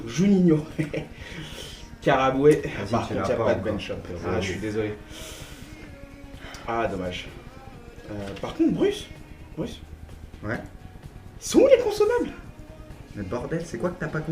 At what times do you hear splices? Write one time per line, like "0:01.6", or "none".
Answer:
0:07.3